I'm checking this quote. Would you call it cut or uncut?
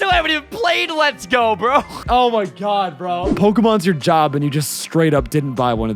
cut